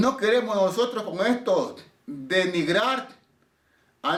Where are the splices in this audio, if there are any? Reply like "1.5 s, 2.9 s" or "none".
none